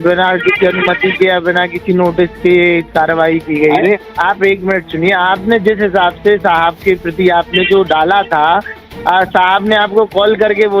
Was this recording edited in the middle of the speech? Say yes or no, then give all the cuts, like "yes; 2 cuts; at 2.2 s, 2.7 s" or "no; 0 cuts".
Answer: yes; 1 cut; at 4.0 s